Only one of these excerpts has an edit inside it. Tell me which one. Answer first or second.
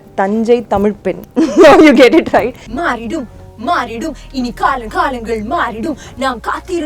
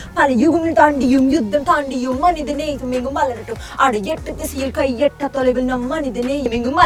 first